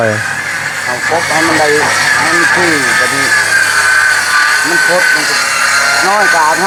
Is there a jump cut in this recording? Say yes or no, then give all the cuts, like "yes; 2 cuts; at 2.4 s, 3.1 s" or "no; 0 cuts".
no; 0 cuts